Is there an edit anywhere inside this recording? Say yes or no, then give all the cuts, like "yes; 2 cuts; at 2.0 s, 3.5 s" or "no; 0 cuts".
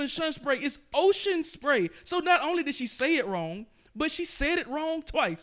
no; 0 cuts